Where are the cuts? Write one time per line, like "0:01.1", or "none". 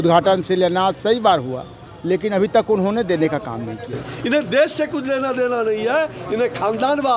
none